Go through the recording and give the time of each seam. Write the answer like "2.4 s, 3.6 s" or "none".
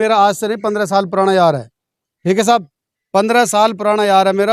none